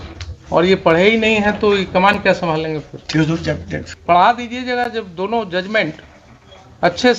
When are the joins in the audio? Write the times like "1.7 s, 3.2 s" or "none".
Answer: 3.9 s